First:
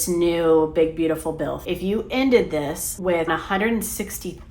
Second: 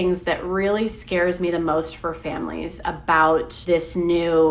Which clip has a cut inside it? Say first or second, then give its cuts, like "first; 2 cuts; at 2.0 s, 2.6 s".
first; 2 cuts; at 1.6 s, 3.3 s